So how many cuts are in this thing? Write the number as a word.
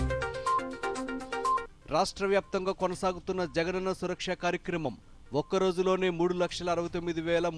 one